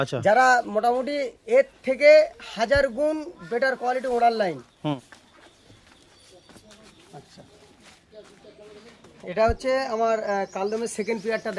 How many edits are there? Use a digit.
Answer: 1